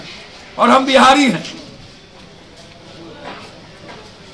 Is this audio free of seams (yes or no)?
yes